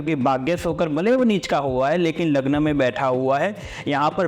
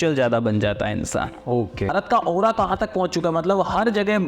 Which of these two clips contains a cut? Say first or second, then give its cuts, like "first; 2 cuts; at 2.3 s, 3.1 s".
second; 1 cut; at 1.9 s